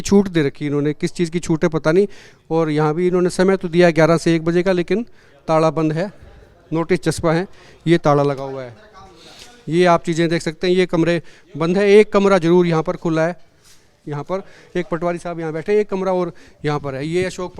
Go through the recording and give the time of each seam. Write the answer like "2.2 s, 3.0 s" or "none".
none